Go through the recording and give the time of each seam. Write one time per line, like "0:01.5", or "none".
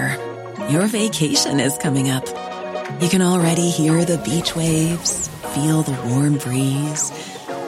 none